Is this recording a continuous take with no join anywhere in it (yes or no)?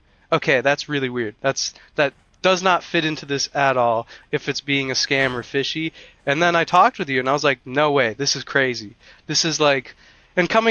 yes